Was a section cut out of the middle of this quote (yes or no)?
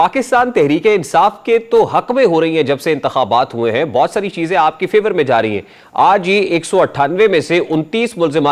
no